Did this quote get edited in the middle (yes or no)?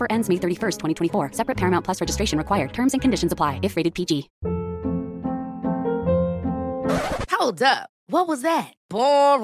yes